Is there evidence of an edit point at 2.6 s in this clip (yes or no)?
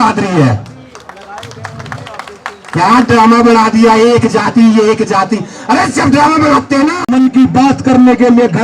no